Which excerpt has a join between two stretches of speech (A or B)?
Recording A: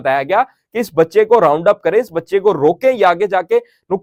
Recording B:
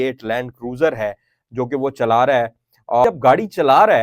B